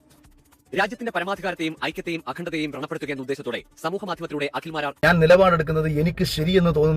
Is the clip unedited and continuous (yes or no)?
no